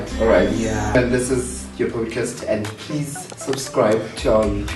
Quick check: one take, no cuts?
no; 1 cut; at 0.9 s

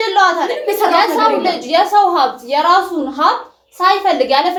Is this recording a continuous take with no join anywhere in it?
yes; 0 cuts

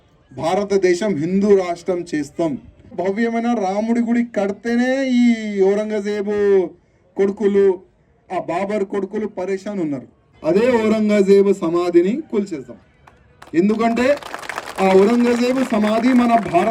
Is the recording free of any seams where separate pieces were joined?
no; 2 cuts; at 3.0 s, 10.2 s

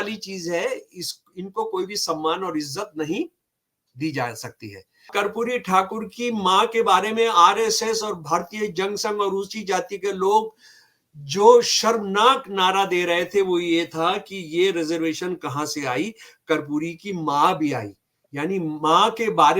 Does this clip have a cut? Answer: yes; 1 cut; at 5.1 s

